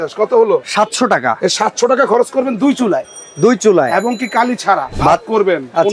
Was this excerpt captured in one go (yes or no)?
no